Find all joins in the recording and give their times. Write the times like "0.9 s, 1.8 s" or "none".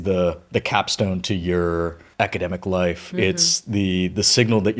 2.0 s